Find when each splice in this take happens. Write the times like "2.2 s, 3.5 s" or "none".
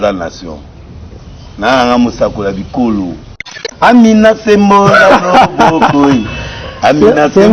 3.6 s